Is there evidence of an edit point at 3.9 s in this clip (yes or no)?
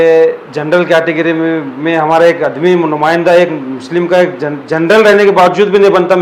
no